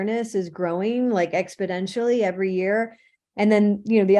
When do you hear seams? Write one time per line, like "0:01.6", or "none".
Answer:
none